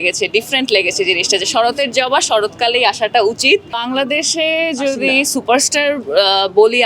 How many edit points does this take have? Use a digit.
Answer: 1